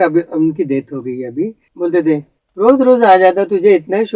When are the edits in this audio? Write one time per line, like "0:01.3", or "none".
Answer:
0:01.6
0:02.4